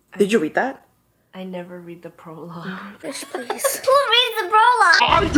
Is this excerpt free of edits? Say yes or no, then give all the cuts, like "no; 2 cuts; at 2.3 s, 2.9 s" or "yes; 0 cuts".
yes; 0 cuts